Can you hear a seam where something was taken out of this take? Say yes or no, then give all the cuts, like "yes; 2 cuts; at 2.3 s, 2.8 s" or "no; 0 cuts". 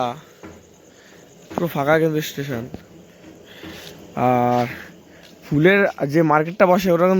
no; 0 cuts